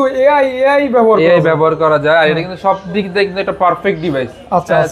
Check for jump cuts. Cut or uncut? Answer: uncut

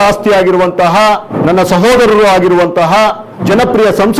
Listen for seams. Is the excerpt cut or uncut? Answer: cut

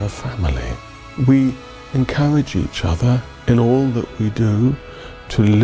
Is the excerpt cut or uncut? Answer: cut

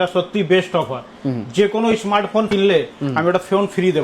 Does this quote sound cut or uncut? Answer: cut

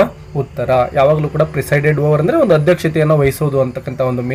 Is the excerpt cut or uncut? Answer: uncut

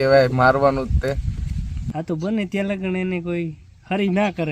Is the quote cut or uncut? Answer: cut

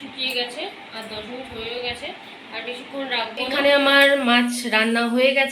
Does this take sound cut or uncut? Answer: cut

